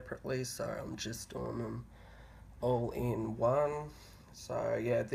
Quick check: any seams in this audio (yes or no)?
no